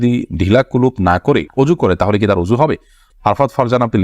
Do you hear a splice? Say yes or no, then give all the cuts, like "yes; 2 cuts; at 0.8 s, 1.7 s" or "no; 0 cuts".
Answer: yes; 1 cut; at 3.1 s